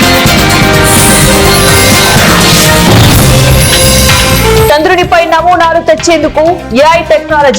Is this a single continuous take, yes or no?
no